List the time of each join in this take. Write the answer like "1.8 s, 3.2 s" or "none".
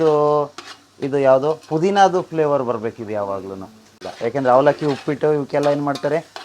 none